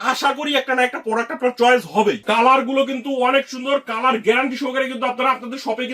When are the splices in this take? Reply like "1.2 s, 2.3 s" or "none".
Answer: 2.2 s